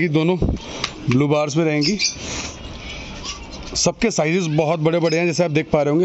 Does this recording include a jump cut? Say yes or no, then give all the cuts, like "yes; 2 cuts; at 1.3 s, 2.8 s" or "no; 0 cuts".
no; 0 cuts